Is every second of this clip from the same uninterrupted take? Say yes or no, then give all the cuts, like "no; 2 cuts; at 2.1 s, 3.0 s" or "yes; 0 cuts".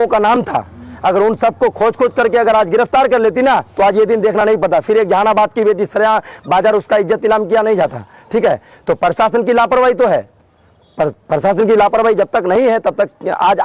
yes; 0 cuts